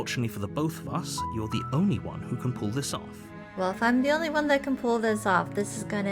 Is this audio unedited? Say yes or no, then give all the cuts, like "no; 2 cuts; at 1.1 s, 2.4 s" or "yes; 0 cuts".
no; 1 cut; at 3.2 s